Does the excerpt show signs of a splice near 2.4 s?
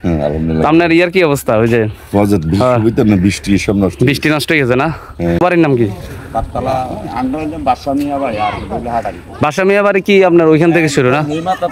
no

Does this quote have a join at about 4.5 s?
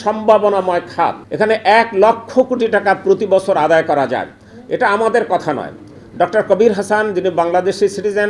no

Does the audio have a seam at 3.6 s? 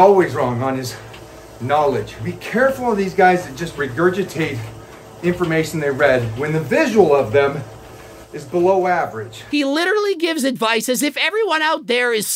yes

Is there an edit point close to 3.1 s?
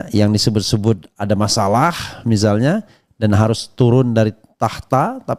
no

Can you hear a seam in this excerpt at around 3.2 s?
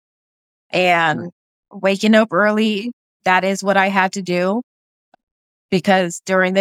yes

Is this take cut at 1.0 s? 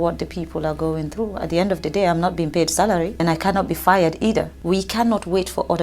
no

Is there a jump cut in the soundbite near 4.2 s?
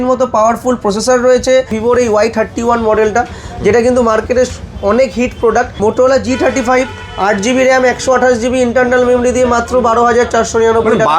no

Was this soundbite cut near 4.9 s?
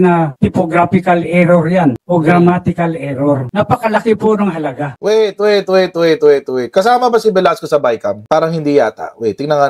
yes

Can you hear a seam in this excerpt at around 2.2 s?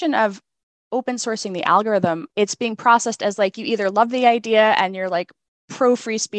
yes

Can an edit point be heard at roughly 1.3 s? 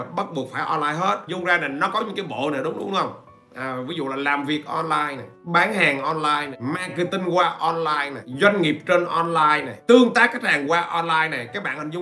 yes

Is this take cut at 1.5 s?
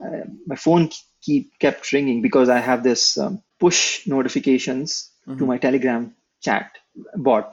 no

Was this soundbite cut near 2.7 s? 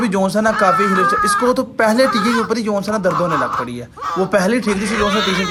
no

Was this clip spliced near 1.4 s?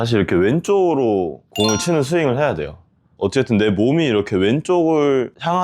no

